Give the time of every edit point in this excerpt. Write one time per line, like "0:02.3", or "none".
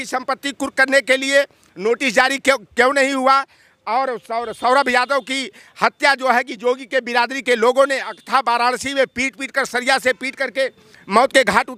none